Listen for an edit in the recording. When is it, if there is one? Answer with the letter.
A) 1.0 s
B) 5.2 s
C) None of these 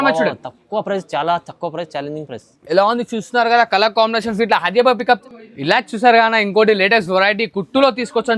B